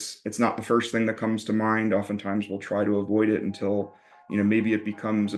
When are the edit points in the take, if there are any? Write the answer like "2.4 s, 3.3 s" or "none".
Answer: none